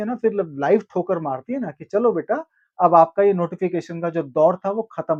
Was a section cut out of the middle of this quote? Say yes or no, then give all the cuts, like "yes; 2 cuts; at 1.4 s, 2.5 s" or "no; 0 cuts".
no; 0 cuts